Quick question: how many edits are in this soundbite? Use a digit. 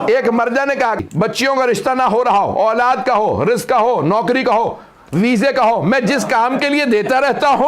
1